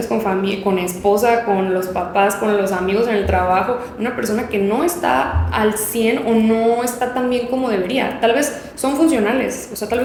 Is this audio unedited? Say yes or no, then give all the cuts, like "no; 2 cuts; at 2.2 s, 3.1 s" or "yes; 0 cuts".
yes; 0 cuts